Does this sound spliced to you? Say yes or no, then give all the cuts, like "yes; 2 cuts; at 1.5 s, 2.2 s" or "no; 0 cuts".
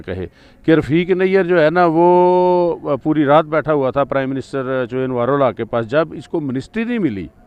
no; 0 cuts